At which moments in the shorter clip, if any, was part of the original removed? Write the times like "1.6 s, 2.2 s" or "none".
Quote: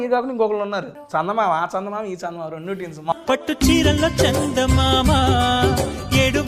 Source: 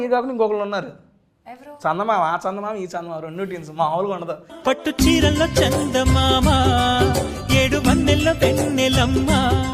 1.0 s, 3.1 s

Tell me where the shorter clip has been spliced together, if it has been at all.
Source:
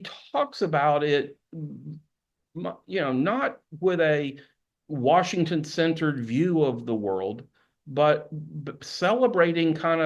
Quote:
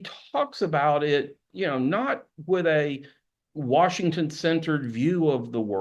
1.4 s

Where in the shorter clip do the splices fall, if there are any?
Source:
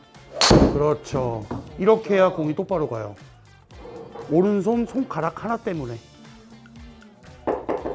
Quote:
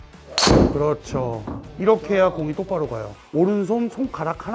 3.2 s

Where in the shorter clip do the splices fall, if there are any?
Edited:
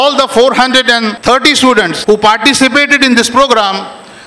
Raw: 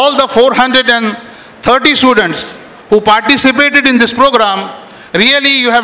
1.2 s, 1.9 s

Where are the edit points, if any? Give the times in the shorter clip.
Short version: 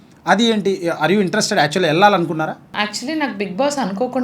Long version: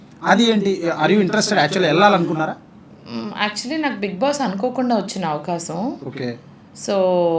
2.7 s

